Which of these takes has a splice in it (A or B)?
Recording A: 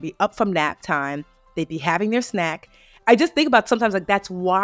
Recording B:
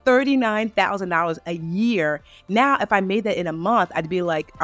A